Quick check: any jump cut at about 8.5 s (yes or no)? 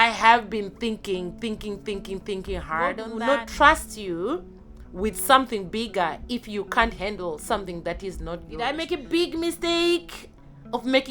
yes